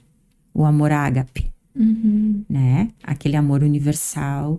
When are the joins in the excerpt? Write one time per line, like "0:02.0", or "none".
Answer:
none